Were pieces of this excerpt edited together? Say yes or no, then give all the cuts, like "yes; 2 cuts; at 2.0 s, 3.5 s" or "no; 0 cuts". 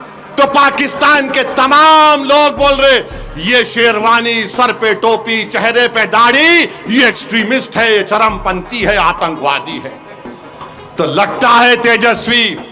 no; 0 cuts